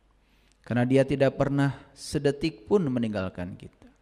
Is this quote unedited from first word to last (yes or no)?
yes